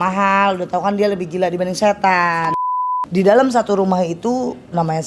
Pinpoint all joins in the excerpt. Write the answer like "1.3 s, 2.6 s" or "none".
2.9 s